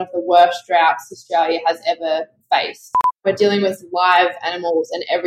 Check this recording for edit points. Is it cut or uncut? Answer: cut